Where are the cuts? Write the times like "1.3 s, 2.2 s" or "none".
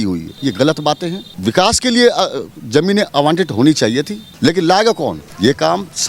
4.2 s